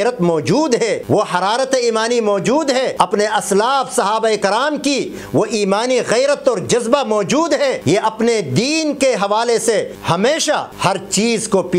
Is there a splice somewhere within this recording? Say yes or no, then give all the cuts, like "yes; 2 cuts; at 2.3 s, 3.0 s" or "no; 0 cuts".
yes; 5 cuts; at 1.0 s, 3.1 s, 7.8 s, 9.9 s, 10.7 s